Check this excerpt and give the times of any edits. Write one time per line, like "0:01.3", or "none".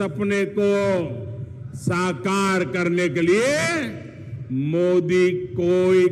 none